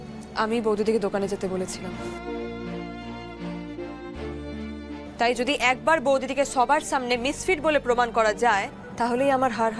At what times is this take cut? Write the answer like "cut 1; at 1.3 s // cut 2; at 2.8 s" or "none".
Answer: none